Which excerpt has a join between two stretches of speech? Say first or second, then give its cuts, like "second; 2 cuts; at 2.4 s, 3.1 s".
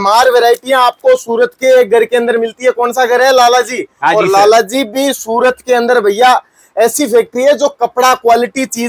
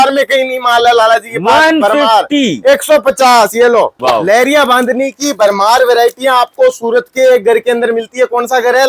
second; 1 cut; at 4.0 s